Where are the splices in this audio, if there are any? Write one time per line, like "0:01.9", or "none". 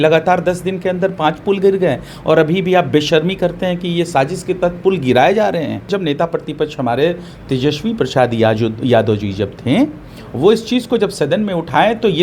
0:05.9

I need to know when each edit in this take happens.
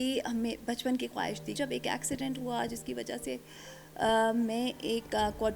0:01.6

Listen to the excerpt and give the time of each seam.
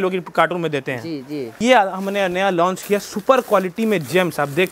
0:01.5

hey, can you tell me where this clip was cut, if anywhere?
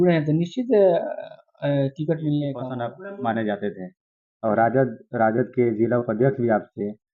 0:02.8

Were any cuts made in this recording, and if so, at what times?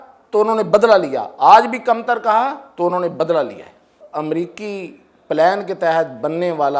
0:04.0

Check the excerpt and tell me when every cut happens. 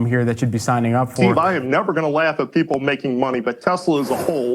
0:01.1

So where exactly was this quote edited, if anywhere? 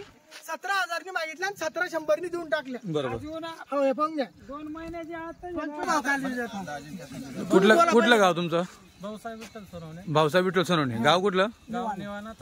0:05.8

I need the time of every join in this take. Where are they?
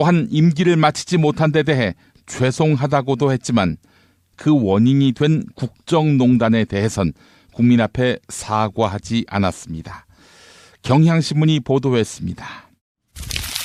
none

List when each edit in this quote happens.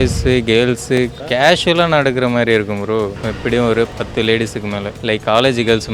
0:01.1
0:03.2
0:03.9
0:04.9

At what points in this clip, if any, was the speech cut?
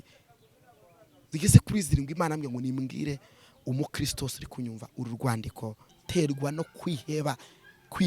0:05.9

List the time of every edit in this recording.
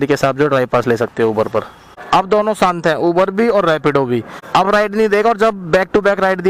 none

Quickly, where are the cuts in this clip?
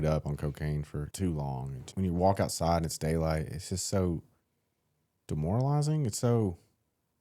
0:01.1
0:01.8

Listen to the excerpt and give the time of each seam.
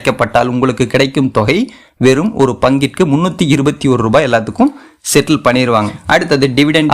0:06.0

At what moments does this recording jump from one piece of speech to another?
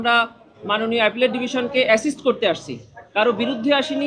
none

